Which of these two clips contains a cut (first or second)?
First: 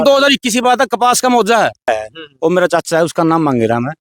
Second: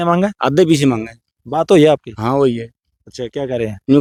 first